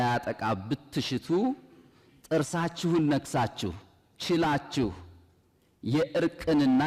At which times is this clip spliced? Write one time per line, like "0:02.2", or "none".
none